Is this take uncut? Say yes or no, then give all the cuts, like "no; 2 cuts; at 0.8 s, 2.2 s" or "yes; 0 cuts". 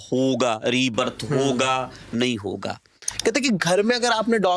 no; 1 cut; at 3.1 s